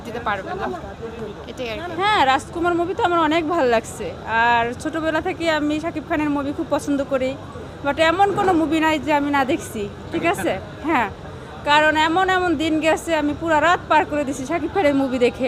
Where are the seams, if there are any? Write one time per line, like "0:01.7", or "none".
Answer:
none